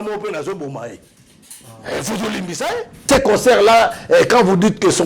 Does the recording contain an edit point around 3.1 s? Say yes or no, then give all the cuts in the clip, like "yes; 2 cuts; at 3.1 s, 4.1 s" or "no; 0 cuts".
yes; 1 cut; at 3.1 s